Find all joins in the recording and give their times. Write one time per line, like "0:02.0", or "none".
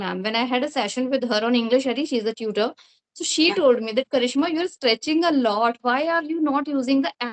none